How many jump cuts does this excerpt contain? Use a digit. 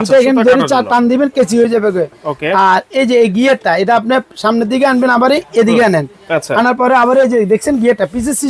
0